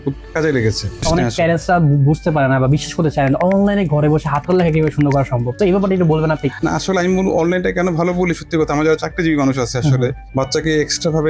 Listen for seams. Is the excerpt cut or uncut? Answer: cut